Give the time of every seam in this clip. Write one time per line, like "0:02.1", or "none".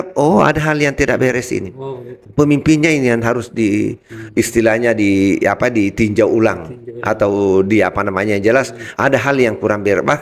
none